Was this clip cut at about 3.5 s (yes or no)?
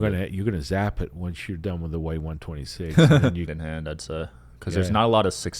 yes